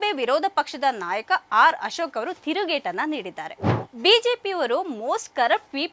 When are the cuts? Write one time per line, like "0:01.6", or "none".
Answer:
0:03.7